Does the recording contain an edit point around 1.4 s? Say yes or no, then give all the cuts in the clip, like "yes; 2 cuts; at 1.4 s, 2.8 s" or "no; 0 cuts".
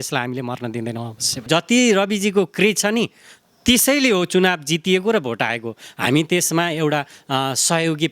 yes; 1 cut; at 1.4 s